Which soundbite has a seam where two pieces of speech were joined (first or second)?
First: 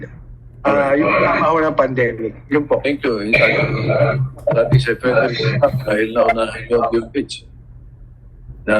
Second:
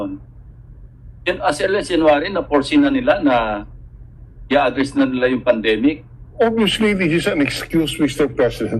second